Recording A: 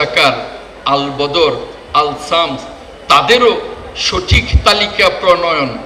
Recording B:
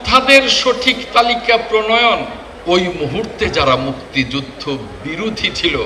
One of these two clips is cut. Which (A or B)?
B